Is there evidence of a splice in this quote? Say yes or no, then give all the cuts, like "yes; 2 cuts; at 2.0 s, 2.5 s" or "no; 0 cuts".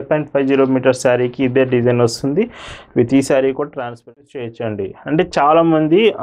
yes; 1 cut; at 4.3 s